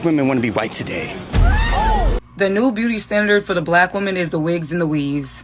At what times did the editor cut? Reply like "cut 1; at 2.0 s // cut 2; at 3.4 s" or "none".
cut 1; at 2.1 s